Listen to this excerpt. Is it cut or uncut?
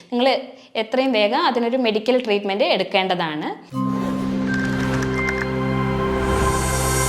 cut